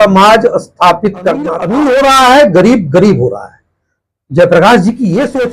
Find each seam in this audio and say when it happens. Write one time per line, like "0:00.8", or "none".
0:01.6